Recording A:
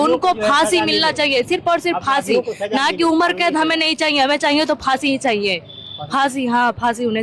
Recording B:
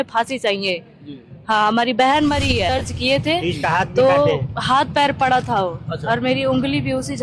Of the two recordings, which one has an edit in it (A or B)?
B